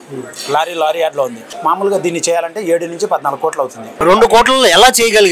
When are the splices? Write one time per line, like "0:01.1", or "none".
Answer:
0:01.4
0:03.9